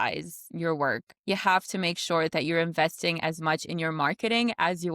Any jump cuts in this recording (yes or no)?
yes